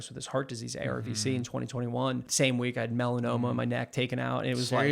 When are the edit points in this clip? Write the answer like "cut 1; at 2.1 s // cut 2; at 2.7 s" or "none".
cut 1; at 2.3 s